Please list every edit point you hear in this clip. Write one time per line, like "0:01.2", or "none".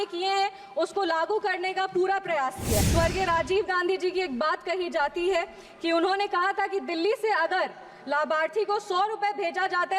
0:02.8

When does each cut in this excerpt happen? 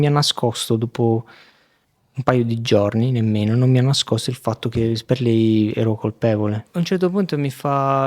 0:06.6

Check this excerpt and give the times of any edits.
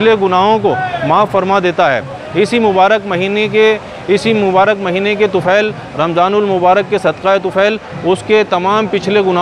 none

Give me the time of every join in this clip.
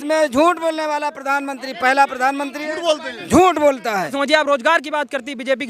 0:04.1

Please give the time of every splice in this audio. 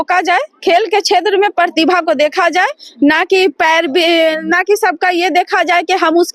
none

